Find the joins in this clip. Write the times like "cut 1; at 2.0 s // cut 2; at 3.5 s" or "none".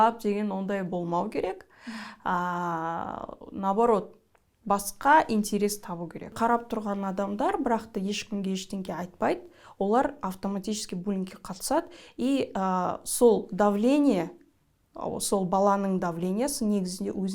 cut 1; at 6.3 s